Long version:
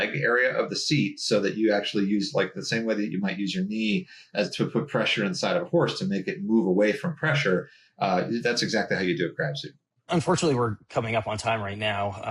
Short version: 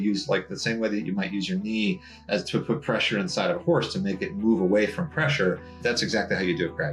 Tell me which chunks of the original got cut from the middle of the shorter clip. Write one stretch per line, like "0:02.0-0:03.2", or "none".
0:07.9-0:08.4